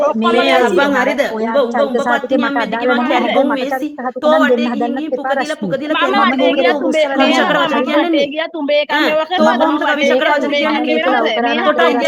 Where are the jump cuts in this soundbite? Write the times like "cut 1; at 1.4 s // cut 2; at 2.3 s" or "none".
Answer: none